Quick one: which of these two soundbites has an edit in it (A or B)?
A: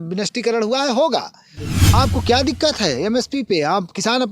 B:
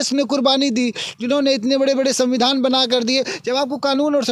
A